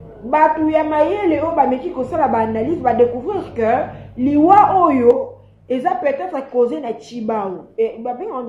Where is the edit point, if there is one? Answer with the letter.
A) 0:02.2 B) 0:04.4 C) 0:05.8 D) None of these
D